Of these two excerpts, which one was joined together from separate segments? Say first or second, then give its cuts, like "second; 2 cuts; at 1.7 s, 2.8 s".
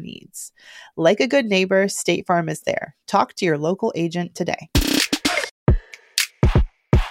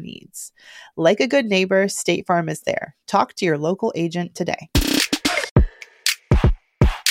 second; 1 cut; at 5.5 s